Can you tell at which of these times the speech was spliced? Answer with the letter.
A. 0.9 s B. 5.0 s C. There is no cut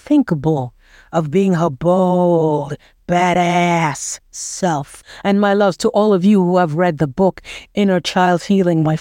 B